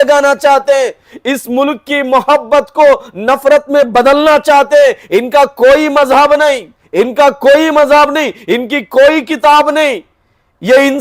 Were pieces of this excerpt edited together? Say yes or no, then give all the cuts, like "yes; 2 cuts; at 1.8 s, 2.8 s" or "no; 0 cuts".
no; 0 cuts